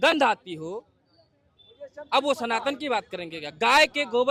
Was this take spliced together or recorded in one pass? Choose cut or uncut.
uncut